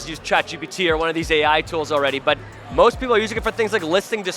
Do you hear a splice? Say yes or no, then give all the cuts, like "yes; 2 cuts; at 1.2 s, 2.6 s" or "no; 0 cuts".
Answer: no; 0 cuts